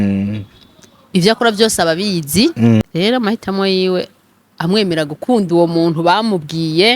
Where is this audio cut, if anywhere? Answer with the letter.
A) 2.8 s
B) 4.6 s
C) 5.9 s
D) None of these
A